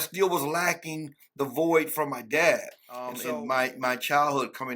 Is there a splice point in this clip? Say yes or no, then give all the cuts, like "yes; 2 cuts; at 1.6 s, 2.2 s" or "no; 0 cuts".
yes; 1 cut; at 3.2 s